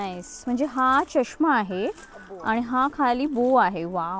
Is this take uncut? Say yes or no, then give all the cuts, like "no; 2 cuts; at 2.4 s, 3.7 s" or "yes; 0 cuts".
yes; 0 cuts